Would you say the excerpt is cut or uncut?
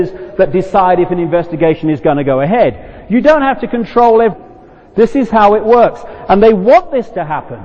uncut